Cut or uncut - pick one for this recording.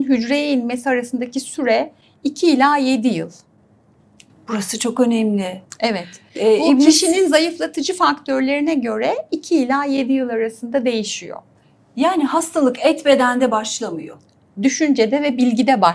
uncut